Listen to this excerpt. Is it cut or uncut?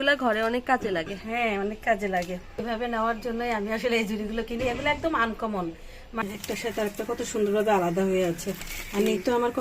cut